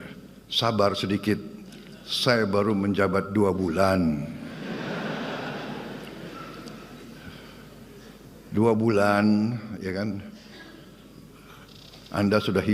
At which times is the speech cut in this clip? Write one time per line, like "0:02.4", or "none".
none

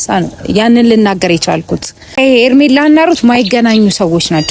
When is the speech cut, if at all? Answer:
0:02.1

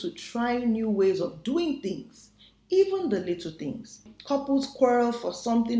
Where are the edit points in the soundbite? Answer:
0:04.1

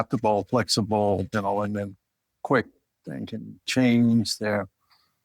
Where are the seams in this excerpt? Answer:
none

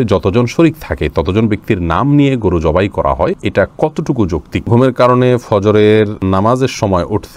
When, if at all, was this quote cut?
0:03.4
0:04.7
0:06.2

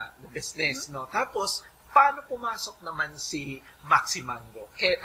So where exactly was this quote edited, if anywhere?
none

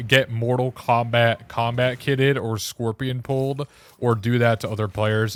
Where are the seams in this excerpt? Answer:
none

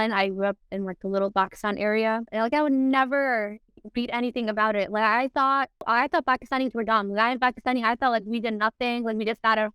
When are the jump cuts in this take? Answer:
0:02.3
0:05.9

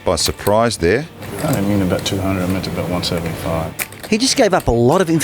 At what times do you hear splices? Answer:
0:01.2
0:04.0

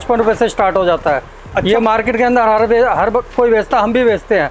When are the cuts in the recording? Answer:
none

